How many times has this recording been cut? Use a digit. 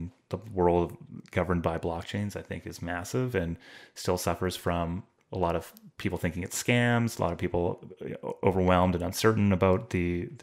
1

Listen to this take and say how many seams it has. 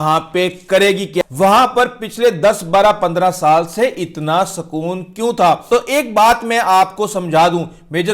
2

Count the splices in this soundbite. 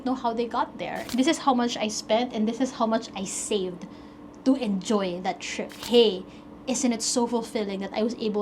2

